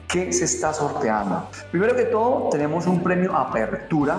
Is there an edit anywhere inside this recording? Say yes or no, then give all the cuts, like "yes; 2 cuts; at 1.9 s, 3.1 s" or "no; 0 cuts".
yes; 1 cut; at 1.6 s